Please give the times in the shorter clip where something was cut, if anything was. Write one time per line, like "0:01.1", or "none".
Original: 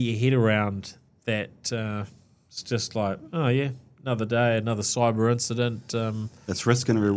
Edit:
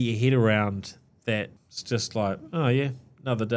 0:01.6